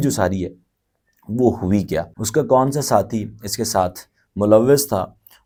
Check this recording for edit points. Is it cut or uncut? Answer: uncut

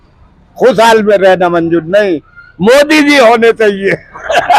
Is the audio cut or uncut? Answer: uncut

